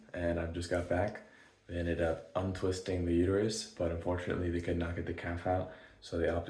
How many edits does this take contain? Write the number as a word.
zero